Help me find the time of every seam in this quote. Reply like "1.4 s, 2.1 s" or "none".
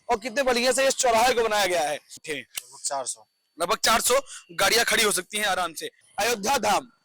2.2 s, 6.0 s